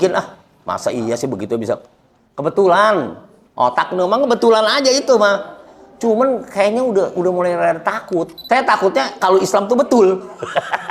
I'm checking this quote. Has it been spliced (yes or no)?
yes